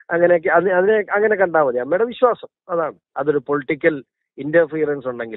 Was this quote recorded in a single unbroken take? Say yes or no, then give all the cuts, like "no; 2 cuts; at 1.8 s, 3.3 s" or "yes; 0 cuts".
no; 1 cut; at 3.0 s